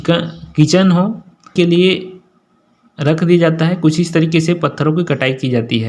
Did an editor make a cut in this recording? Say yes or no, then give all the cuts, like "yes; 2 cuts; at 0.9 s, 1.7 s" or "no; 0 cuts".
yes; 1 cut; at 1.5 s